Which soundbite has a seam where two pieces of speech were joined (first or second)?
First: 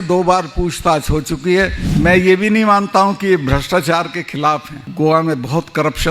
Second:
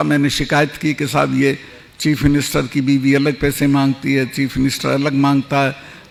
first